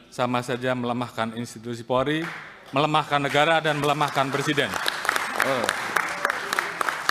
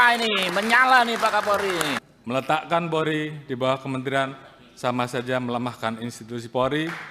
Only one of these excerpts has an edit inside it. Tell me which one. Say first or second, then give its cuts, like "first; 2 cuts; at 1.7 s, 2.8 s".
second; 1 cut; at 2.1 s